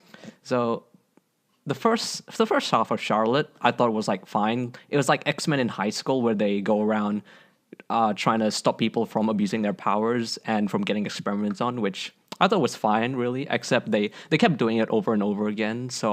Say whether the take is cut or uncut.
uncut